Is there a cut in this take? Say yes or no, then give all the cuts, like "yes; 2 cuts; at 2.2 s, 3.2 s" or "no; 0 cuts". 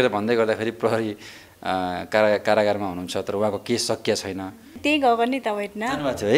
yes; 1 cut; at 4.8 s